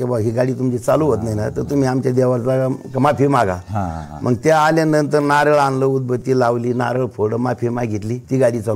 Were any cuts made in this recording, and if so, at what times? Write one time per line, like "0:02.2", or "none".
none